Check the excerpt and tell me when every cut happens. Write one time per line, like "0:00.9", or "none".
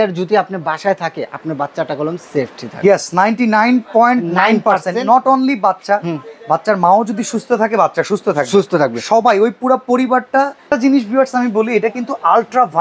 0:10.7

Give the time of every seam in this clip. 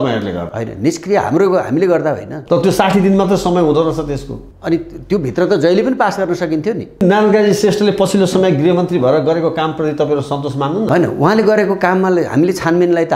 0:02.3
0:07.0

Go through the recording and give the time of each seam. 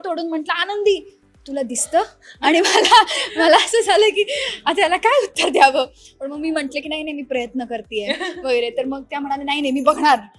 none

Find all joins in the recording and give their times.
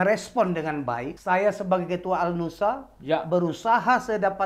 0:01.1

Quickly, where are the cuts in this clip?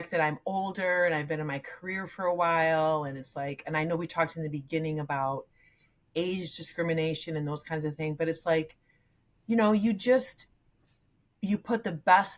none

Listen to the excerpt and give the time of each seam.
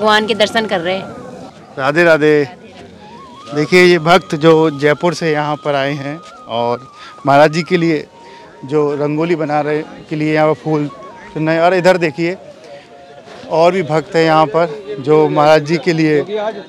none

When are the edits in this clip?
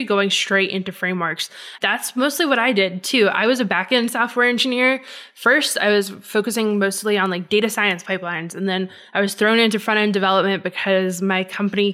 0:01.7

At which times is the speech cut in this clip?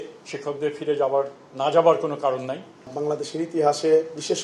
0:02.9

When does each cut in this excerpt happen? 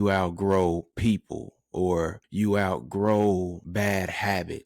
0:02.2
0:03.6

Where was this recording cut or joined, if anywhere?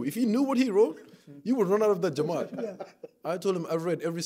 none

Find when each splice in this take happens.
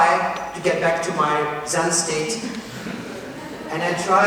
none

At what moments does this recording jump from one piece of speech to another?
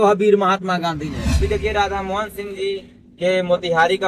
0:01.4

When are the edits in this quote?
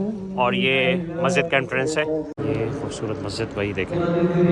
0:02.4

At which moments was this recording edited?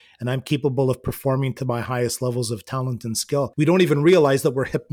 0:03.5

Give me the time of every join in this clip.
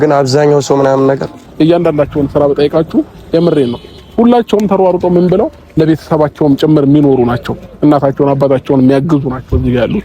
0:01.4

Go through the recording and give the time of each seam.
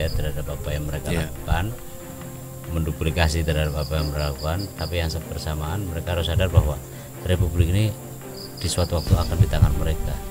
none

